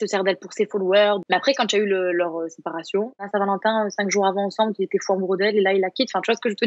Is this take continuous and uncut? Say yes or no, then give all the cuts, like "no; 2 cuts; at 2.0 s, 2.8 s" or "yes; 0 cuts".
no; 2 cuts; at 1.2 s, 3.3 s